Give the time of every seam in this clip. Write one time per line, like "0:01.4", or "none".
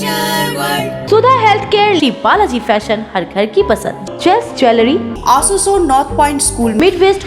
0:01.0
0:05.1